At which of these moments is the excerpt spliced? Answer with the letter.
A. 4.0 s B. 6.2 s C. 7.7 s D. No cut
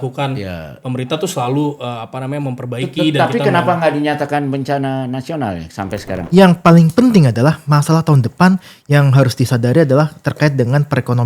B